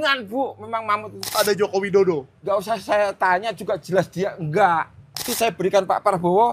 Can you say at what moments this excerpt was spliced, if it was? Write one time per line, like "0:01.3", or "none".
0:01.3
0:02.3
0:05.3